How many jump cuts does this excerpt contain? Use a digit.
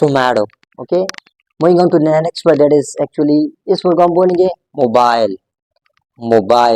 0